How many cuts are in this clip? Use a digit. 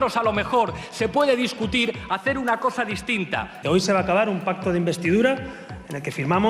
1